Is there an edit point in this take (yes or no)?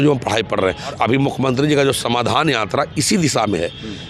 yes